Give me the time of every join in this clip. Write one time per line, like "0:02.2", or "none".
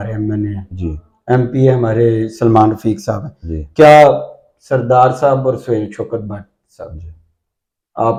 none